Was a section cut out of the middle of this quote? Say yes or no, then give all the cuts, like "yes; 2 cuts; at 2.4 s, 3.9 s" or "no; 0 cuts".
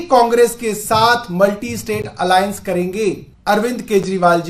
yes; 1 cut; at 3.3 s